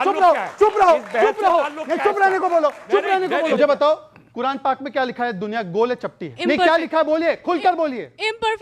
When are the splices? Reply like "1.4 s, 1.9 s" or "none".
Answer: 3.5 s, 6.3 s